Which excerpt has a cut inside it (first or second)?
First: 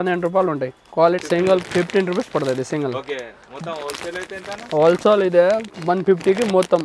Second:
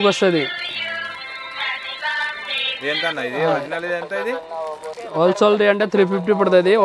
first